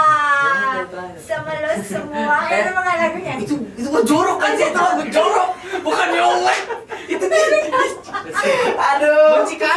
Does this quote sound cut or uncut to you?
uncut